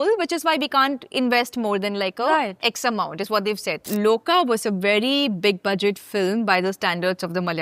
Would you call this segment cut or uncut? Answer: cut